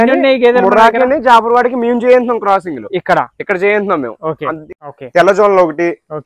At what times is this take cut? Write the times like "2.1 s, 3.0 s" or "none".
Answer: 4.7 s